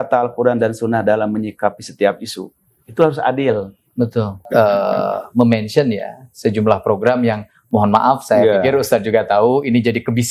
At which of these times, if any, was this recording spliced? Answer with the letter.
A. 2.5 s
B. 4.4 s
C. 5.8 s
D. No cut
B